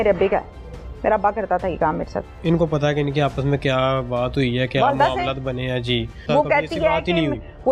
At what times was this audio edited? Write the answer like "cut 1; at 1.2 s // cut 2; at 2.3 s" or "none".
cut 1; at 2.3 s // cut 2; at 6.2 s